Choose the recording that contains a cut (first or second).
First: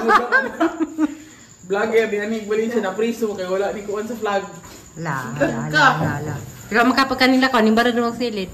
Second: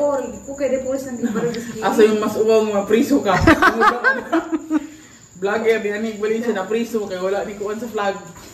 first